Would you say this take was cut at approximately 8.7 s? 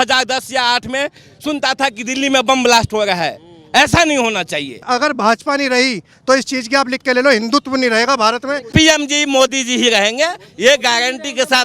yes; 2 cuts; at 4.9 s, 8.7 s

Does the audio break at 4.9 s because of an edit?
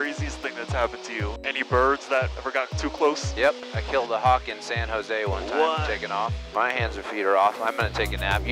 no; 4 cuts; at 1.3 s, 2.4 s, 3.6 s, 6.4 s

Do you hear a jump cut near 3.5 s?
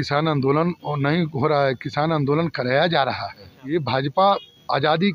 yes; 1 cut; at 3.5 s

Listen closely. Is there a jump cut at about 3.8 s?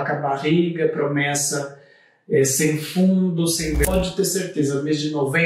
yes; 1 cut; at 3.8 s

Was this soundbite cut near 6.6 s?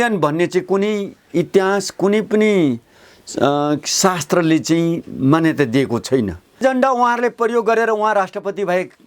yes; 1 cut; at 6.6 s

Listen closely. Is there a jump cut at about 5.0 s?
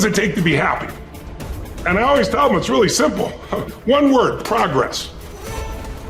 yes; 1 cut; at 5.0 s

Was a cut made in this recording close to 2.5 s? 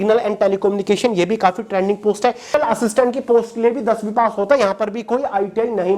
yes; 1 cut; at 2.5 s

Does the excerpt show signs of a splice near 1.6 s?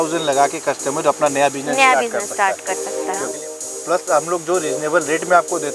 no; 1 cut; at 3.3 s

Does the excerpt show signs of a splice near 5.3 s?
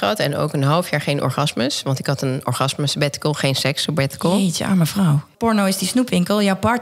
yes; 1 cut; at 5.3 s

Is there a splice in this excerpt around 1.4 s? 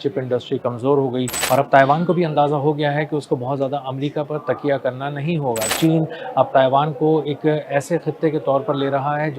yes; 2 cuts; at 1.4 s, 5.7 s

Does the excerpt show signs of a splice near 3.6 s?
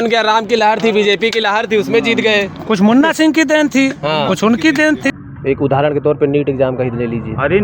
no; 1 cut; at 5.1 s

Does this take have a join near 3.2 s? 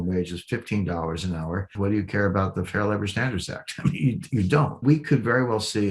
no; 2 cuts; at 1.7 s, 4.8 s

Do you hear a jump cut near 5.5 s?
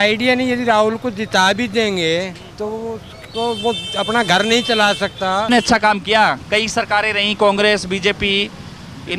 yes; 1 cut; at 5.5 s

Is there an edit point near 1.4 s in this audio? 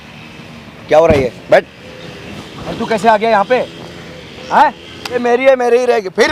no; 1 cut; at 5.2 s

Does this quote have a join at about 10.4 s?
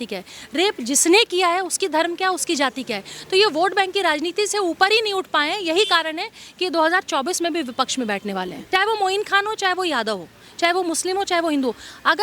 no; 1 cut; at 8.6 s

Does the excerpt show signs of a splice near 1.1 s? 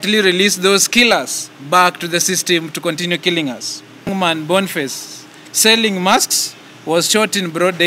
no; 1 cut; at 4.1 s

